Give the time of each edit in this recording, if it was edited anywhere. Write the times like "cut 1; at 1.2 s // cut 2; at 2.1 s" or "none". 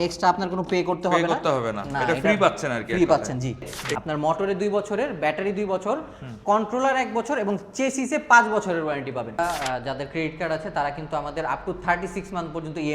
cut 1; at 3.8 s // cut 2; at 9.4 s